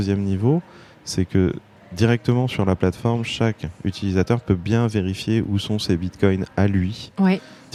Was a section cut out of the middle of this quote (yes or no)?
no